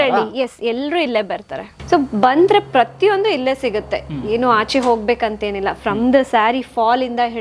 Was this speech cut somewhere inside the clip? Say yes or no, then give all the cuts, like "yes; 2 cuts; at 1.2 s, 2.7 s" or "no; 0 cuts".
yes; 1 cut; at 1.7 s